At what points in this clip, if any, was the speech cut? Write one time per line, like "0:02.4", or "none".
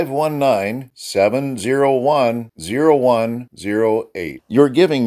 none